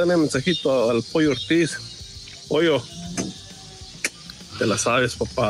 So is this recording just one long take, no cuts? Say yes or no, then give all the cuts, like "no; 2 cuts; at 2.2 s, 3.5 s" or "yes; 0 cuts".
yes; 0 cuts